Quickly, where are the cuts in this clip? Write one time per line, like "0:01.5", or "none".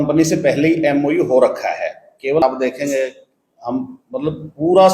0:02.4